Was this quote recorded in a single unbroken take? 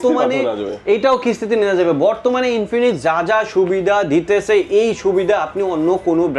yes; 0 cuts

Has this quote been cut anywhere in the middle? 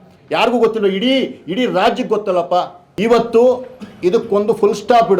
yes; 1 cut; at 2.8 s

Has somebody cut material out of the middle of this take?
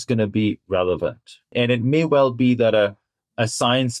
yes; 1 cut; at 1.4 s

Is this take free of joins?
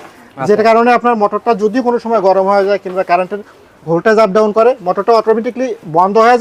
yes; 0 cuts

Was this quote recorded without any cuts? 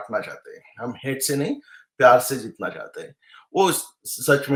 yes; 0 cuts

